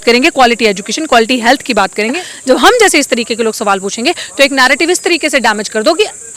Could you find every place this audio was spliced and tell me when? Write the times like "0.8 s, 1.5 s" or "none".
2.2 s